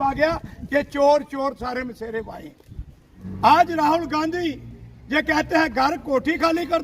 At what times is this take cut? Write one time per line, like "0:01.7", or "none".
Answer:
0:03.2